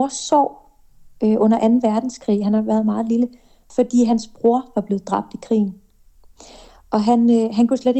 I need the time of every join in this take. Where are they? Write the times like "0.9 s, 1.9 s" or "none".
3.6 s

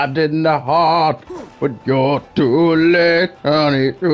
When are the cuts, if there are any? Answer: none

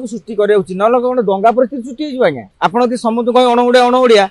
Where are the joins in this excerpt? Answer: 2.5 s

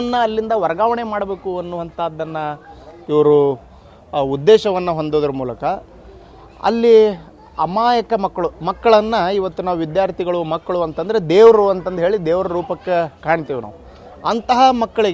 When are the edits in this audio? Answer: none

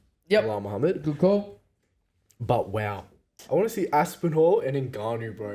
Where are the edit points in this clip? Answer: 3.4 s

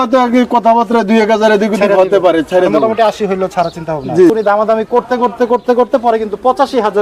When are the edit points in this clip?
4.3 s

